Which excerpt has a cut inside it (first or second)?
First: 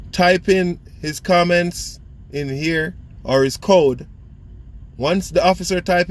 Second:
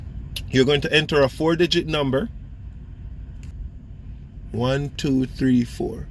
second